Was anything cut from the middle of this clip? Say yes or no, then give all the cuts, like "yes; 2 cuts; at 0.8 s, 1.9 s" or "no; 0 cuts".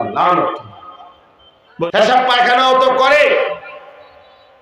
yes; 1 cut; at 1.9 s